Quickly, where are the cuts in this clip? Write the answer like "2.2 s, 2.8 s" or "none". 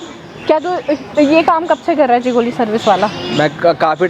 none